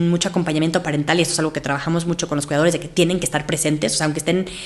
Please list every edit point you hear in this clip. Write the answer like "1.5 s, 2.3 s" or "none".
none